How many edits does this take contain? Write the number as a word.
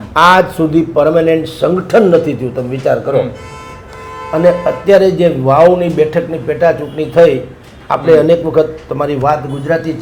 zero